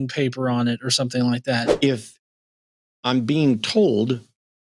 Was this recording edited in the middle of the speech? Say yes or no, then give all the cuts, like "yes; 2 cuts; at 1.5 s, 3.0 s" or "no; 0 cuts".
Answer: yes; 1 cut; at 1.7 s